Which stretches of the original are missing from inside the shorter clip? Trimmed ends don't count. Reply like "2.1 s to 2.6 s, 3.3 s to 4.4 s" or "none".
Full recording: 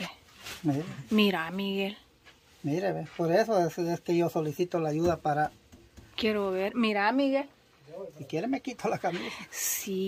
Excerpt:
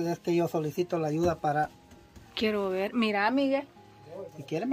none